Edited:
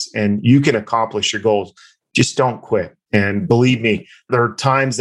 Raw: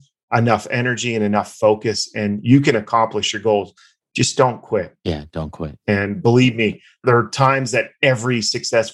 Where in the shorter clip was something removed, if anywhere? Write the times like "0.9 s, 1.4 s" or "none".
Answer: 3.0 s